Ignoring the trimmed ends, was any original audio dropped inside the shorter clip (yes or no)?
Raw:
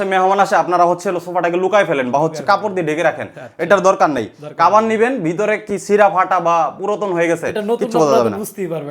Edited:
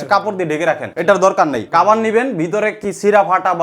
yes